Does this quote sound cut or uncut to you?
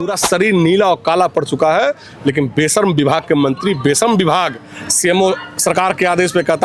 uncut